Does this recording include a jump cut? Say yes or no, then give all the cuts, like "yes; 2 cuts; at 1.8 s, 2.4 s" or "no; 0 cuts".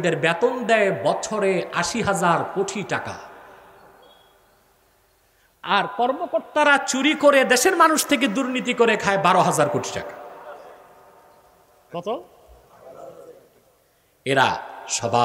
no; 0 cuts